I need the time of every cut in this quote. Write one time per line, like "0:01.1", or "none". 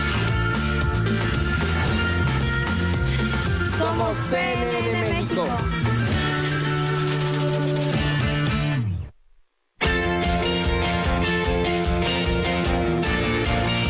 0:00.9